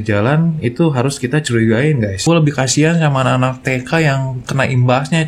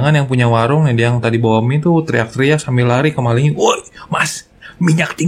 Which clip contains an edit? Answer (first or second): first